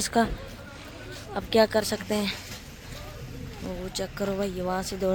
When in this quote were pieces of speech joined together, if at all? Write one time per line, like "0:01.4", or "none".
none